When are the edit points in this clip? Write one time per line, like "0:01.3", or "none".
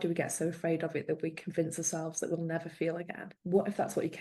0:03.3